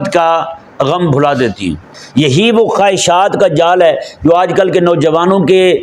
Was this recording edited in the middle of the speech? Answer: yes; 1 cut; at 1.9 s

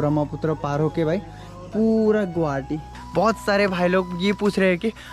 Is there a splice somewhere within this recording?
yes; 1 cut; at 2.9 s

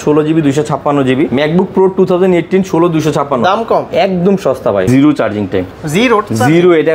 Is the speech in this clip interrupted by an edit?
yes; 3 cuts; at 1.3 s, 3.9 s, 4.9 s

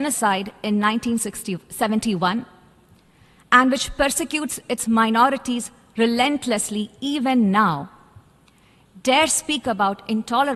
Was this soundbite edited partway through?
no; 0 cuts

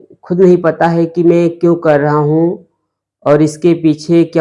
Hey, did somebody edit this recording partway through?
no; 0 cuts

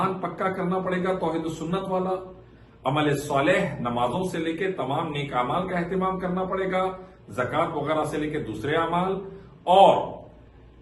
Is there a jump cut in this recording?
no; 0 cuts

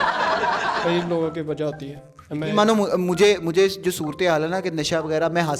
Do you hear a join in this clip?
no; 0 cuts

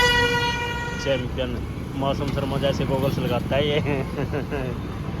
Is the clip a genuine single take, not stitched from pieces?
yes; 0 cuts

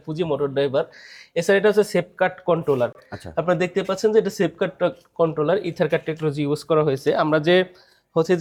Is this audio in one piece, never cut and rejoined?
yes; 0 cuts

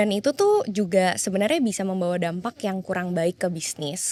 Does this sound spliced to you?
no; 0 cuts

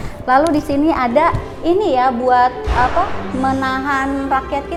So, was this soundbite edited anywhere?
no; 0 cuts

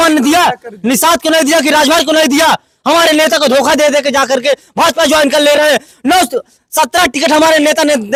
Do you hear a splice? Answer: no; 0 cuts

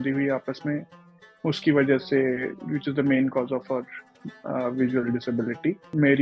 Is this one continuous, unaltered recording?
yes; 0 cuts

